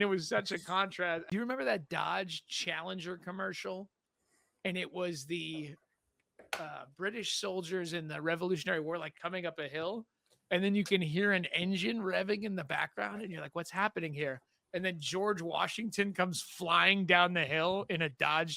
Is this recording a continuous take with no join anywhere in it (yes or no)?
no